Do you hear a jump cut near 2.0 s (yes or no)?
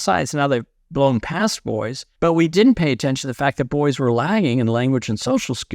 yes